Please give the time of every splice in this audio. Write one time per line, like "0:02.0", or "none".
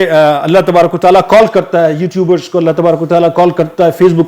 none